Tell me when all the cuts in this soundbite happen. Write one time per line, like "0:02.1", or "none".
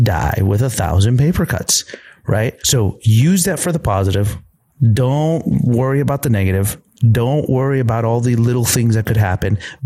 0:02.6